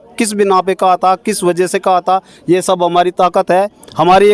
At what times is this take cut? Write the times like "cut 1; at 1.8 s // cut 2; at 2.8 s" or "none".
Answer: none